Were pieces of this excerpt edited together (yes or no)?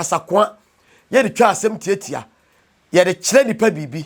no